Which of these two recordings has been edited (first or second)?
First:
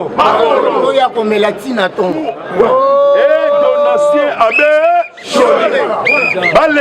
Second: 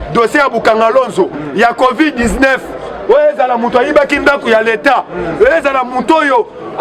first